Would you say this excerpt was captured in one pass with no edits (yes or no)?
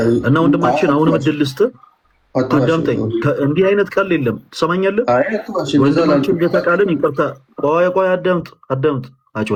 yes